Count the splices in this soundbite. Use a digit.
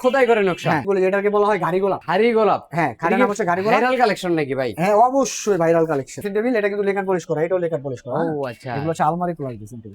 3